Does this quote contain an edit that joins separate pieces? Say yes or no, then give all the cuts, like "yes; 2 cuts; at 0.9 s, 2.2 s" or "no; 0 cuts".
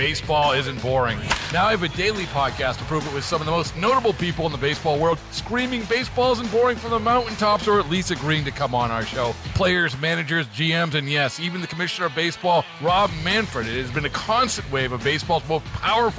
no; 0 cuts